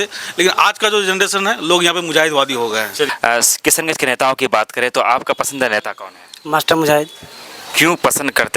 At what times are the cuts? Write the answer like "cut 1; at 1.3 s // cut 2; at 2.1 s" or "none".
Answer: cut 1; at 3.1 s